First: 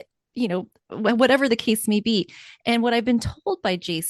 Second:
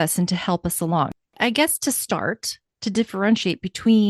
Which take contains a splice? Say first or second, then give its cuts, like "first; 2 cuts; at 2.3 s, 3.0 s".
second; 1 cut; at 1.1 s